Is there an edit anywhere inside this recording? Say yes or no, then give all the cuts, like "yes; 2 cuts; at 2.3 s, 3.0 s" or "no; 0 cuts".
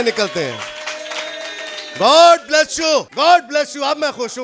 yes; 1 cut; at 3.1 s